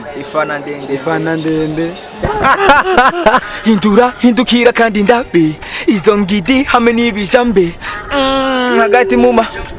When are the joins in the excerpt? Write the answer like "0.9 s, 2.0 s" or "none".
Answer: 3.4 s

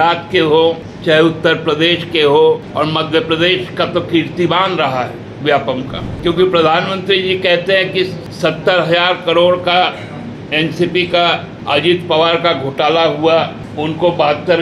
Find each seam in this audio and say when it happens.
0.9 s, 2.7 s, 6.0 s, 8.2 s, 11.5 s, 13.6 s

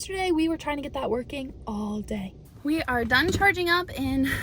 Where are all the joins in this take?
2.6 s

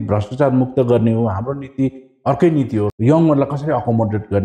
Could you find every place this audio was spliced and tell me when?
2.9 s

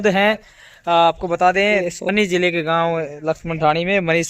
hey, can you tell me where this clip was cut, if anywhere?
1.9 s

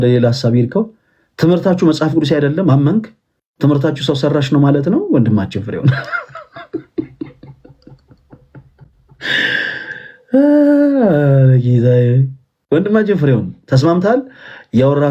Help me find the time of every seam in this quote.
none

